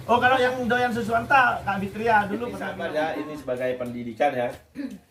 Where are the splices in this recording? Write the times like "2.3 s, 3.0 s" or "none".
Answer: 2.7 s